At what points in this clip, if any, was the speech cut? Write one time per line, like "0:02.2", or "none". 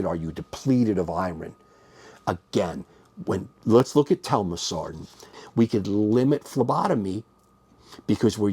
0:05.4